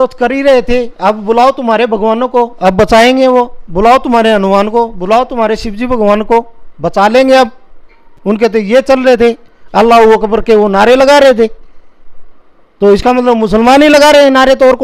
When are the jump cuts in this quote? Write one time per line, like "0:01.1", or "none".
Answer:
none